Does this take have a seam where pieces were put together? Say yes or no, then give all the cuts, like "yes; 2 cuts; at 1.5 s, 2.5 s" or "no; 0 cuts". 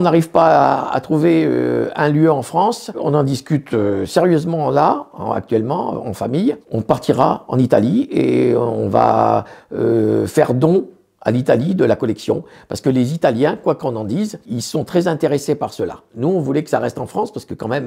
no; 0 cuts